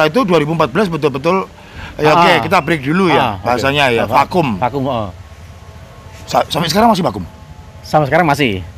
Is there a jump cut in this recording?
no; 0 cuts

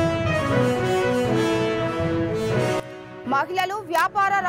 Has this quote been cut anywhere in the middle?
yes; 1 cut; at 2.8 s

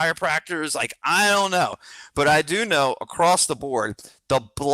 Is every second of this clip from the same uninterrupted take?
no; 1 cut; at 1.9 s

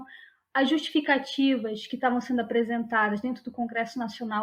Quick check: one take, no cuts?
yes; 0 cuts

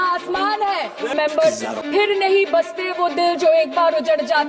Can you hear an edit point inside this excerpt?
yes; 1 cut; at 1.1 s

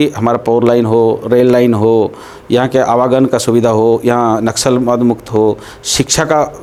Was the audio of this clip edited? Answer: no; 0 cuts

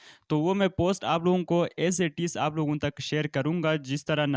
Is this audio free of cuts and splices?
yes; 0 cuts

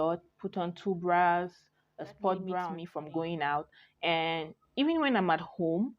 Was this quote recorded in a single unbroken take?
no; 1 cut; at 2.8 s

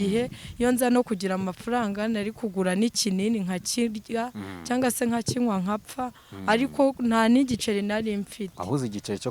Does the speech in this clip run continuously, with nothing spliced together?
yes; 0 cuts

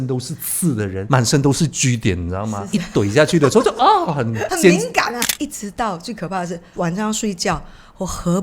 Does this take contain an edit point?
yes; 5 cuts; at 1.0 s, 2.6 s, 4.5 s, 5.2 s, 6.7 s

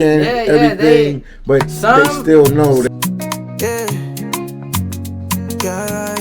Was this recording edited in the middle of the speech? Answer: yes; 1 cut; at 2.8 s

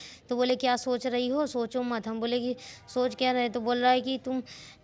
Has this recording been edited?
no; 0 cuts

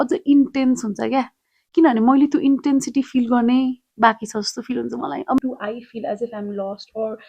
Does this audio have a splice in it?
yes; 1 cut; at 5.4 s

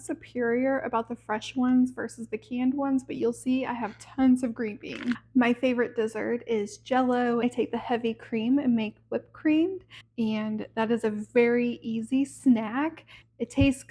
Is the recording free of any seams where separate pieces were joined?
yes; 0 cuts

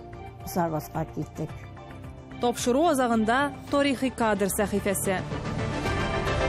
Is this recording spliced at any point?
yes; 1 cut; at 5.3 s

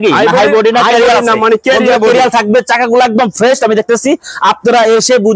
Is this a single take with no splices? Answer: yes; 0 cuts

